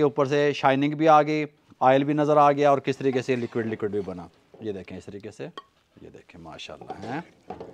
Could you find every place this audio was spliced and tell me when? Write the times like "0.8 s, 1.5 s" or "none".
none